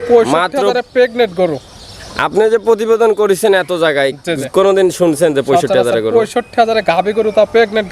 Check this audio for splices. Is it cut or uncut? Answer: uncut